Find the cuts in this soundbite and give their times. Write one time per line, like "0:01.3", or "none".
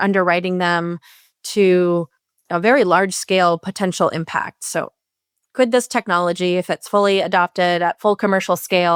none